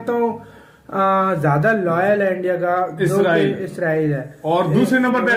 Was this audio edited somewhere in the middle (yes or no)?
no